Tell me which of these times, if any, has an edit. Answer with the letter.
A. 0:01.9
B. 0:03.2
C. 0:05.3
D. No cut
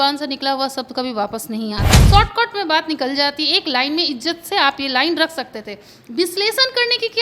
A